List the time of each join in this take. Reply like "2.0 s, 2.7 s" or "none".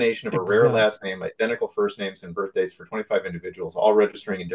none